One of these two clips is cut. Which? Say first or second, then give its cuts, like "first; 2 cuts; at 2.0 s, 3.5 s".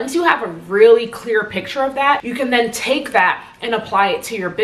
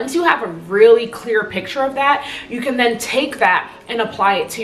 first; 1 cut; at 2.3 s